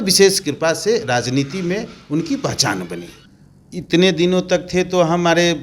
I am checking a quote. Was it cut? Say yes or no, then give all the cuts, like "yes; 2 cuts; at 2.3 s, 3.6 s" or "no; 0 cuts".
yes; 1 cut; at 3.2 s